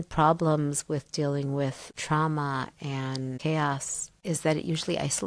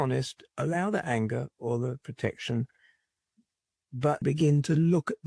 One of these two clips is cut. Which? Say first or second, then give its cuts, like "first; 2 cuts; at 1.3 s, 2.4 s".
second; 1 cut; at 4.2 s